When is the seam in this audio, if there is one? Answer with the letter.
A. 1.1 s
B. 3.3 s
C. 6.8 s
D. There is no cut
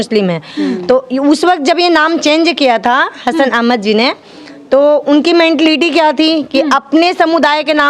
D